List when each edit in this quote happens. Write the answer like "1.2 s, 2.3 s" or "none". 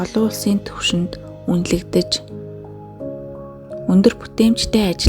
2.0 s, 3.9 s